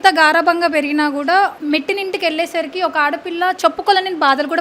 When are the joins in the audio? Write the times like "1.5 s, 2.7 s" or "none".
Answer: 1.6 s